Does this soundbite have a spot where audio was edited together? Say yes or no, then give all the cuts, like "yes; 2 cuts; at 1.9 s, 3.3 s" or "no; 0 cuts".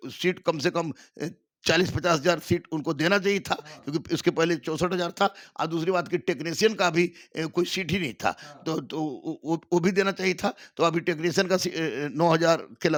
no; 0 cuts